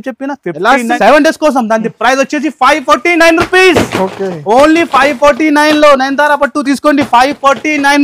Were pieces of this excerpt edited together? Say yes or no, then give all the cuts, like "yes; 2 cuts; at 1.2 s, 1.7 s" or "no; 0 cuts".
yes; 1 cut; at 1.0 s